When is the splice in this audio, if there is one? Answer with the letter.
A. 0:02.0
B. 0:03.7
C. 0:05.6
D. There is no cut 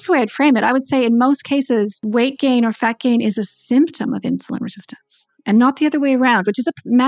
A